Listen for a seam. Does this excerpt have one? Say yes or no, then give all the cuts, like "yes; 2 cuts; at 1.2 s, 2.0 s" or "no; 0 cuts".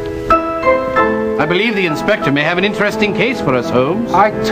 yes; 1 cut; at 1.4 s